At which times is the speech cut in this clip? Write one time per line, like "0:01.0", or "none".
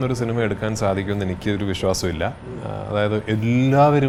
none